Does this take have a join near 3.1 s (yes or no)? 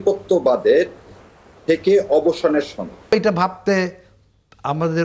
yes